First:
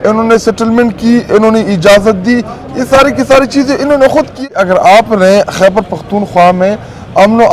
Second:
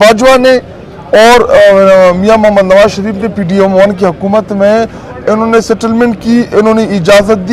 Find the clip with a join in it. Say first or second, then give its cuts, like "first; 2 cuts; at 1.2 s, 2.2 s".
first; 1 cut; at 4.3 s